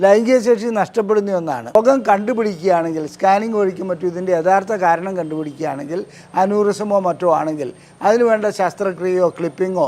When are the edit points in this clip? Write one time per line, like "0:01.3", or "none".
0:01.8